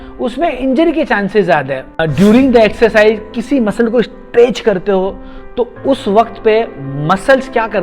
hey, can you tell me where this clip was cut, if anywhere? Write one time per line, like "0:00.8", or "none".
0:02.0